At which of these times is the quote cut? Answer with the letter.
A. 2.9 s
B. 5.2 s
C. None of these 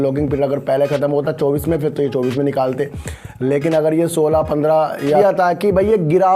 B